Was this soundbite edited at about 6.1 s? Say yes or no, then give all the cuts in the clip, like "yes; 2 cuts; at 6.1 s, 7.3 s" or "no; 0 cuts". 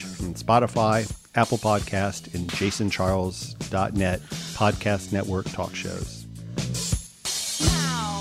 yes; 1 cut; at 6.1 s